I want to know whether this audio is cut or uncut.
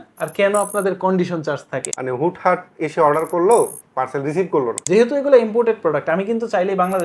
cut